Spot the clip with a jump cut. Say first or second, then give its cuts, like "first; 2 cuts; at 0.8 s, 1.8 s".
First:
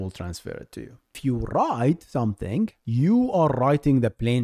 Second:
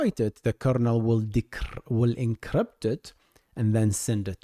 first; 2 cuts; at 1.2 s, 2.8 s